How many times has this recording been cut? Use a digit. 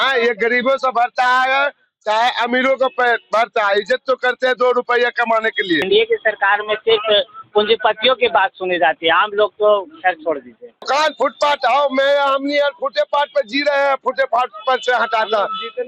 2